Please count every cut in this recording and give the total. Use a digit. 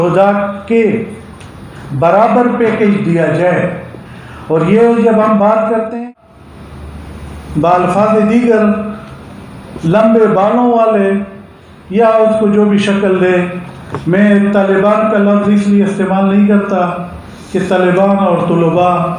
1